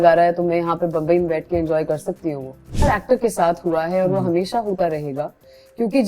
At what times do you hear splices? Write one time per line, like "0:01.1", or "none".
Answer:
0:02.8